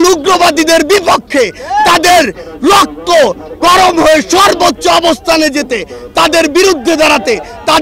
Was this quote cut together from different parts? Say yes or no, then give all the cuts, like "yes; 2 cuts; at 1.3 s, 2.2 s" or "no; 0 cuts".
no; 0 cuts